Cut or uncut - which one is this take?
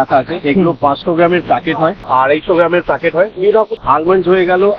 cut